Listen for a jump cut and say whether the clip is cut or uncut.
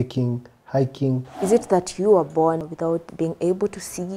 cut